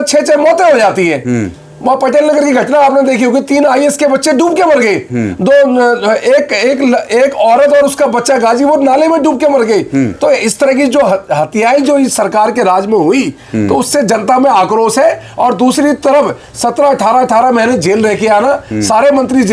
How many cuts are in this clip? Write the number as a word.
zero